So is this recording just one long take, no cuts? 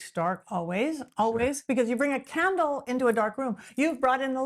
yes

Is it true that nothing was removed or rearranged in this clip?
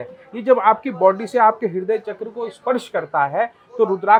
yes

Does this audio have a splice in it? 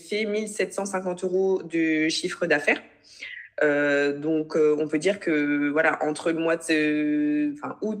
no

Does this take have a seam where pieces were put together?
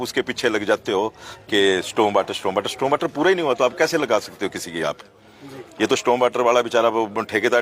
no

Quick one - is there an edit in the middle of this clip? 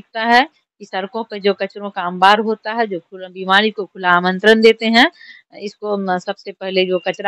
no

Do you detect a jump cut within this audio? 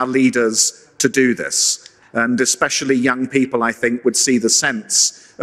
no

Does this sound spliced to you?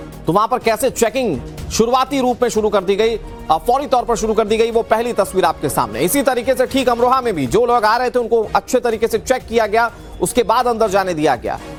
no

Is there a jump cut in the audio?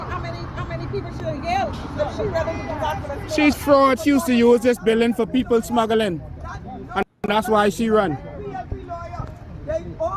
no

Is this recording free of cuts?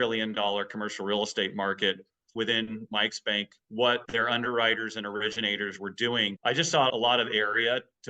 no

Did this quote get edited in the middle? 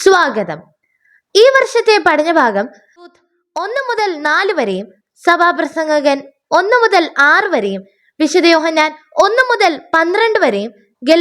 yes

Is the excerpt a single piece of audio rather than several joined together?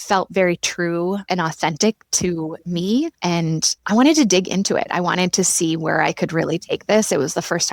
yes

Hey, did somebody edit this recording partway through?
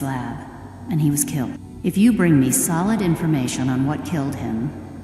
yes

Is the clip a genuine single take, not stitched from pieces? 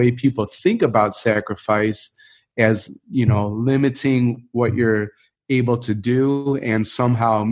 yes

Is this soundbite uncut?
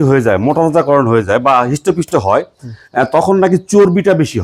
yes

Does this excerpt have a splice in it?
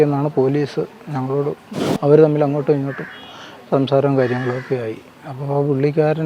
yes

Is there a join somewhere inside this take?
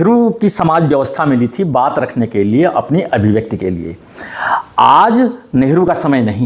no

